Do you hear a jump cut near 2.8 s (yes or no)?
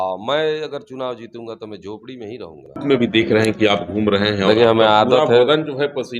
yes